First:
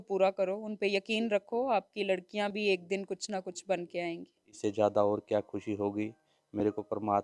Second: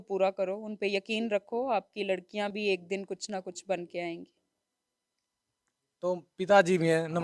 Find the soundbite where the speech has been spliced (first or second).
first